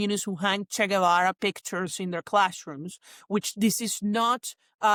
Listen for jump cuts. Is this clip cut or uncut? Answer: uncut